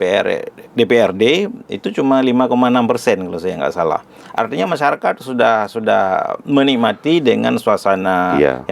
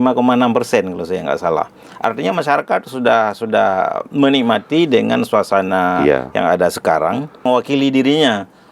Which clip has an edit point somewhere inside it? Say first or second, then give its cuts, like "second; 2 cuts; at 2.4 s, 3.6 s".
second; 1 cut; at 7.4 s